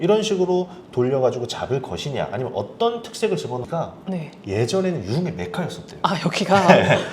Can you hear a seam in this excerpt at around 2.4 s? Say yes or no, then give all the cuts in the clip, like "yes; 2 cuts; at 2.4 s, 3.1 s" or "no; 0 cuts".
no; 1 cut; at 3.6 s